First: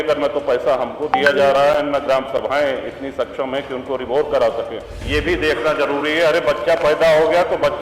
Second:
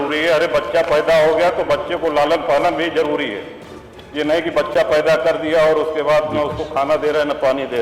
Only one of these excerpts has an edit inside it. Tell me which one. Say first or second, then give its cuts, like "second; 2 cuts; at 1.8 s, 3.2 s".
first; 1 cut; at 5.0 s